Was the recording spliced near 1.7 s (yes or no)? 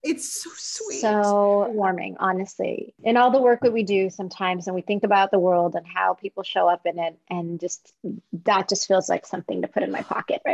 yes